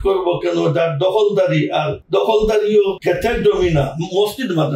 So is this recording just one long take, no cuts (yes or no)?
no